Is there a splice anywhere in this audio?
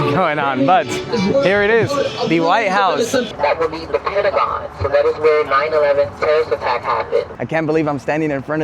yes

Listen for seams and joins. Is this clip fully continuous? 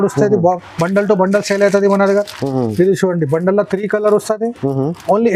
yes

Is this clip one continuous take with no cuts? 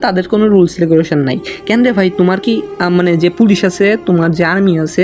yes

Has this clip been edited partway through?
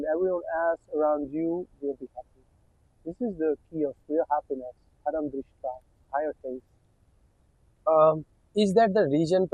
no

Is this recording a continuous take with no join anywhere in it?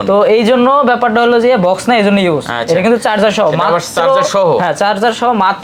yes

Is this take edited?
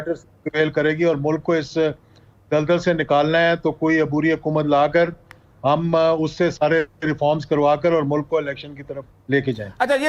no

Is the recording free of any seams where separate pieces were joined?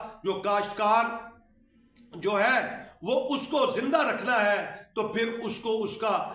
yes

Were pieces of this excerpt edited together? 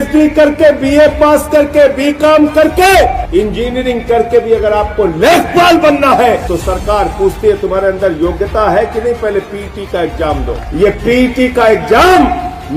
yes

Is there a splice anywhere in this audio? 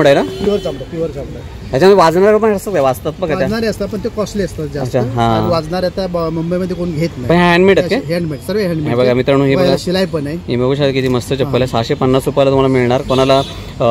no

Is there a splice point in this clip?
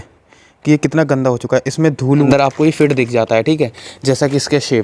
yes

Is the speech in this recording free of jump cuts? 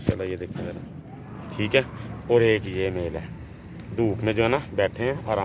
yes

